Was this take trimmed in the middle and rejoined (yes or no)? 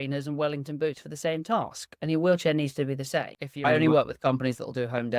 yes